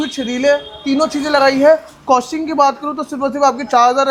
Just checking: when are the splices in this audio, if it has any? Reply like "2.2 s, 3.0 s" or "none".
none